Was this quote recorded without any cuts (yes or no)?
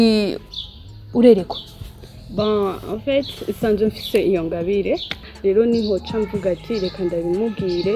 no